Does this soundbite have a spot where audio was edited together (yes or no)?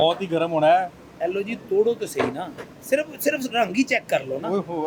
no